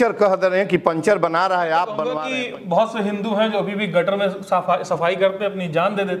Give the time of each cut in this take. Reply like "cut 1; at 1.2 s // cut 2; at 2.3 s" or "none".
cut 1; at 2.2 s